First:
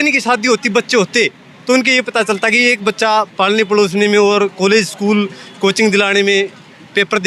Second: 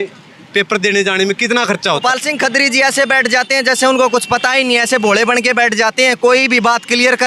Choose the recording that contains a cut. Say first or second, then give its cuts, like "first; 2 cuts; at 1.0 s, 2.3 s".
second; 1 cut; at 2.0 s